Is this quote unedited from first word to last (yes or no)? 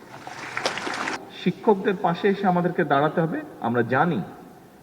no